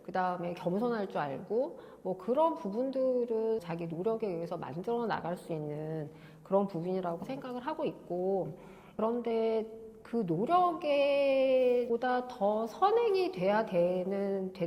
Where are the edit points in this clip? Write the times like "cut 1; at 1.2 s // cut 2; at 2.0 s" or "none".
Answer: none